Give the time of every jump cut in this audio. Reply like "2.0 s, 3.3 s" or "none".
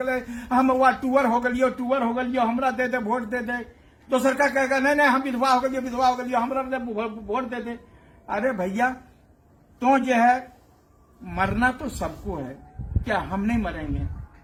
none